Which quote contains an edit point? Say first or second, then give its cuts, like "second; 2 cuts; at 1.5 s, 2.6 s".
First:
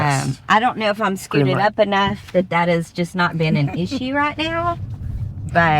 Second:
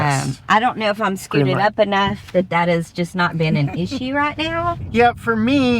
second; 1 cut; at 4.8 s